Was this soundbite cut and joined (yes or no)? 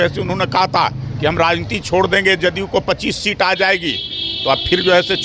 no